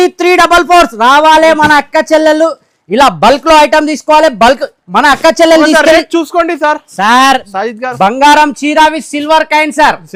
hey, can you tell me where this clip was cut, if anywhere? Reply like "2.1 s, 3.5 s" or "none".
none